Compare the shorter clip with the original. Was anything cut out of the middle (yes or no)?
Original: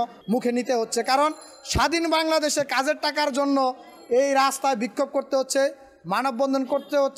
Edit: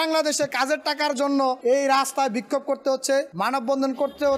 yes